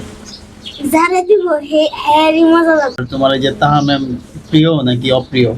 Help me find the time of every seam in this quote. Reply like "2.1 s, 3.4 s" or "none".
3.0 s